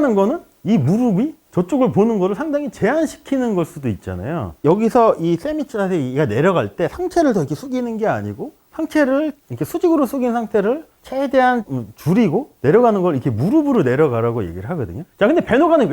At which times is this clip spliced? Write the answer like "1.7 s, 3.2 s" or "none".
4.5 s